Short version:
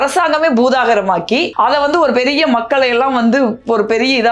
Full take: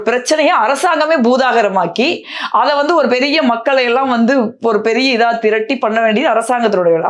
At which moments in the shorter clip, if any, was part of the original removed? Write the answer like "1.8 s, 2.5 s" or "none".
1.5 s